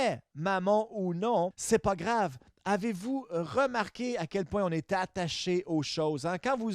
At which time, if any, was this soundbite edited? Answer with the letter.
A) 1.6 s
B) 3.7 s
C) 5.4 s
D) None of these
A